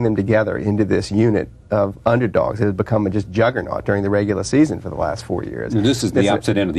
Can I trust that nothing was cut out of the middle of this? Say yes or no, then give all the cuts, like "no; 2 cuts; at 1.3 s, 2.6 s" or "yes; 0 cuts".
yes; 0 cuts